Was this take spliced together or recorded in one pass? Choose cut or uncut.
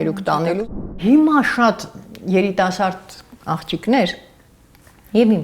cut